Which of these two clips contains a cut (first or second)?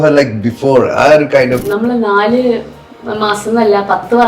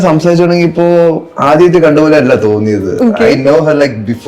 first